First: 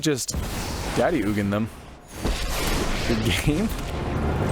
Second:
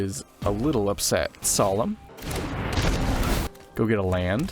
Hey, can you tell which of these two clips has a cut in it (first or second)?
second